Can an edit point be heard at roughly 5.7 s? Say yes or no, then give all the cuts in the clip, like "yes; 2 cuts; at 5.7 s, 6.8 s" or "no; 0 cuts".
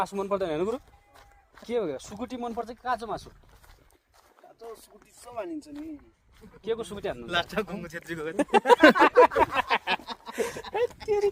no; 0 cuts